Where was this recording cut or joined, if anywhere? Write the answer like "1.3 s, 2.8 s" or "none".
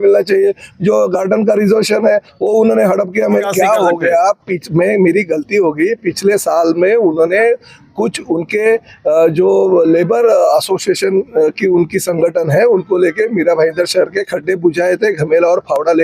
3.4 s